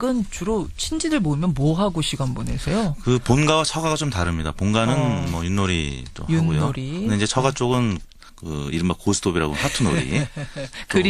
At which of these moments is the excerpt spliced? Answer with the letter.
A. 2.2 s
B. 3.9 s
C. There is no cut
B